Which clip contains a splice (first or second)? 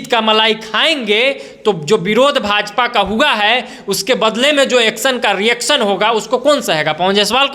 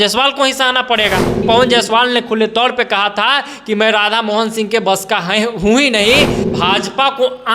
second